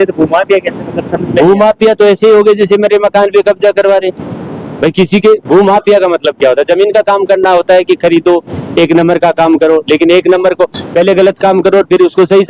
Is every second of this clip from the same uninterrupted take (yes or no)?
yes